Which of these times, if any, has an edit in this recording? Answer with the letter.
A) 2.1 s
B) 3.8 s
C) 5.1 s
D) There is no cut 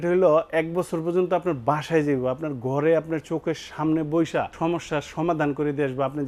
D